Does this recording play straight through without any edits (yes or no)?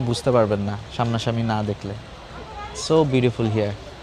yes